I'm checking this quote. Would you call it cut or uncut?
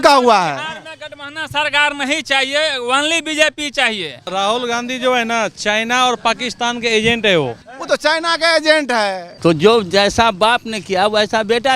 cut